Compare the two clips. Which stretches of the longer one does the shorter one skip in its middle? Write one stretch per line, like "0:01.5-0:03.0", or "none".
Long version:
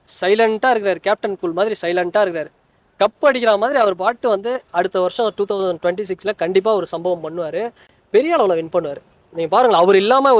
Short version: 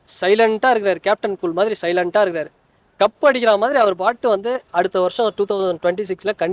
none